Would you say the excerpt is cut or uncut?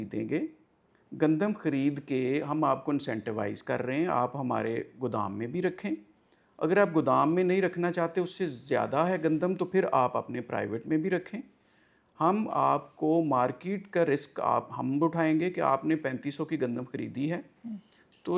uncut